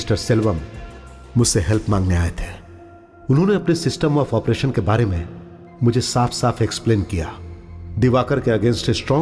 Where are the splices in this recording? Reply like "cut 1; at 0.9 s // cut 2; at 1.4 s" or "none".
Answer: none